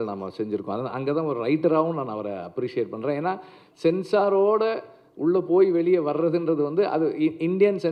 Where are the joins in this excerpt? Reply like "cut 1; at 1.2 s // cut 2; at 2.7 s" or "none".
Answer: none